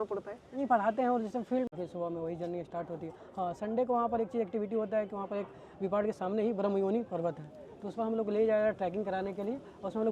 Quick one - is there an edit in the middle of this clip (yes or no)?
yes